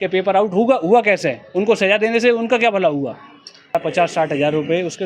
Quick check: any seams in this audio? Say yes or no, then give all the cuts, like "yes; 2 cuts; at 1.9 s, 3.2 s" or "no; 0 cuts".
yes; 1 cut; at 3.7 s